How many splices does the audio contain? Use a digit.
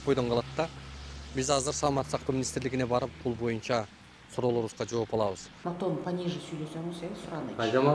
1